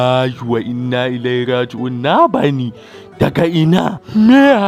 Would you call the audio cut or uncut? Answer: uncut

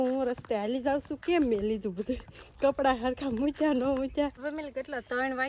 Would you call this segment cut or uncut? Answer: cut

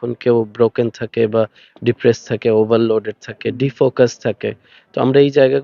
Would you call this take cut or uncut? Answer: uncut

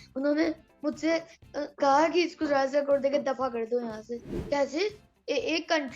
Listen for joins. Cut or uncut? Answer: cut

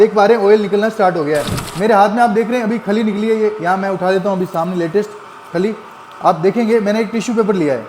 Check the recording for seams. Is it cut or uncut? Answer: cut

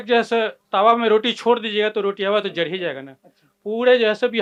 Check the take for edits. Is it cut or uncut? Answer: uncut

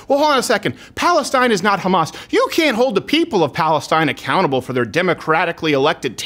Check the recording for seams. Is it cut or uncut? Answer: uncut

